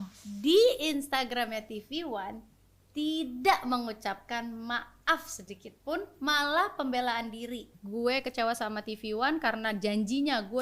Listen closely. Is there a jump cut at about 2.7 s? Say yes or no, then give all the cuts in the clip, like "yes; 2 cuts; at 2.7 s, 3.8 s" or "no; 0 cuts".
no; 1 cut; at 7.8 s